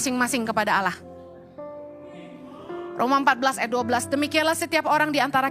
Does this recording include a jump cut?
no; 0 cuts

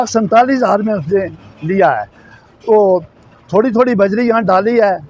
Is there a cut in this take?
no; 0 cuts

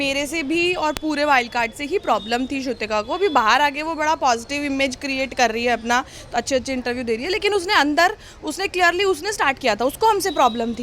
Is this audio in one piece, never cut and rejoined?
yes; 0 cuts

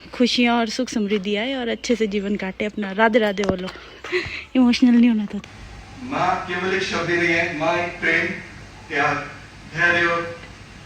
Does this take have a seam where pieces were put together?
yes; 1 cut; at 5.4 s

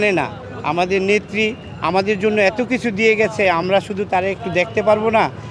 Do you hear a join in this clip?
no; 0 cuts

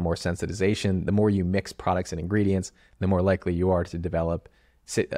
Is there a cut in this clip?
no; 0 cuts

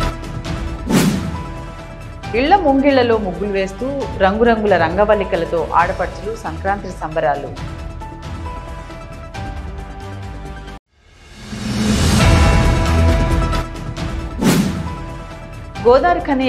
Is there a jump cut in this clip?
no; 0 cuts

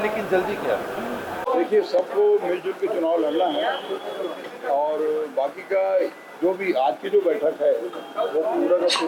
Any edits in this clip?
yes; 1 cut; at 1.5 s

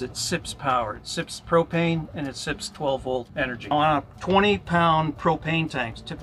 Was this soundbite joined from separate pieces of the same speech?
yes; 1 cut; at 3.7 s

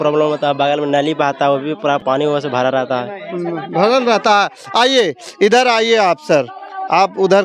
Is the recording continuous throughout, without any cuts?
yes; 0 cuts

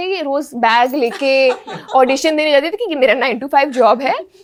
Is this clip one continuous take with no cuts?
yes; 0 cuts

